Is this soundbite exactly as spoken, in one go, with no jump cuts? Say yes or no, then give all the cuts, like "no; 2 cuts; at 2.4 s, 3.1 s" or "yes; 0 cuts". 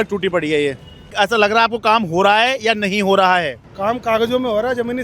no; 2 cuts; at 1.1 s, 3.6 s